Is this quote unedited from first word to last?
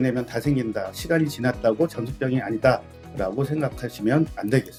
yes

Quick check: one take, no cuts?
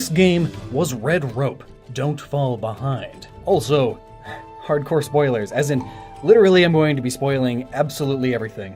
yes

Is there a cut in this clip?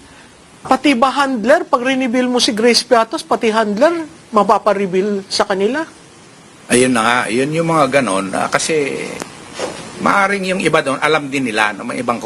no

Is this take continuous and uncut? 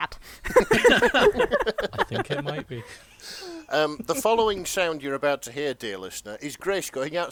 yes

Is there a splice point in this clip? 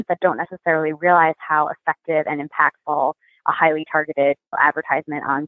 yes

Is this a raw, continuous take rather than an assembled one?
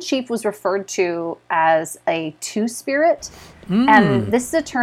yes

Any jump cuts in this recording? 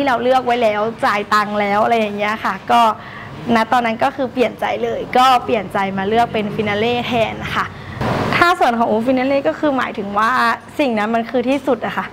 yes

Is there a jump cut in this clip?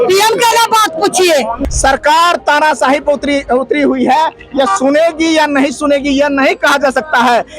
yes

